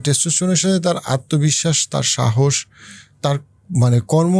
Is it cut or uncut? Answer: uncut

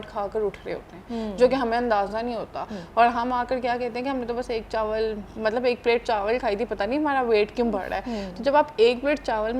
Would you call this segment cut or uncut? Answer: uncut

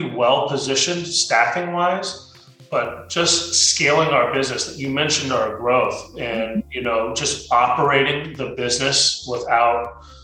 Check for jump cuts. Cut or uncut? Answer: uncut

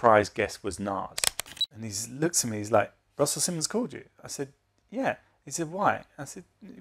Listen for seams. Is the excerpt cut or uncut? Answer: cut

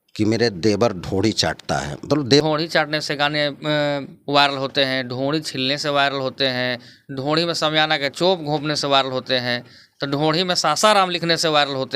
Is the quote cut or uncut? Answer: cut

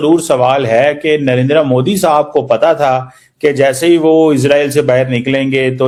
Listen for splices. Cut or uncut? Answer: uncut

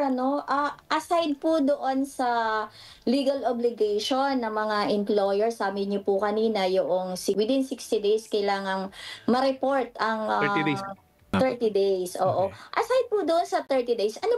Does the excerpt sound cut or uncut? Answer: cut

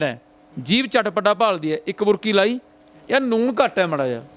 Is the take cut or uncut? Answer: uncut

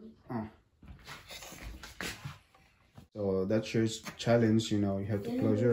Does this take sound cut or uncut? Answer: cut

